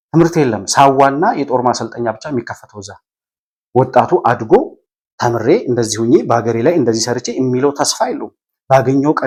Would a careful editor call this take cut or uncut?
uncut